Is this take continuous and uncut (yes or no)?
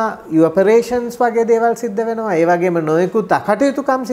yes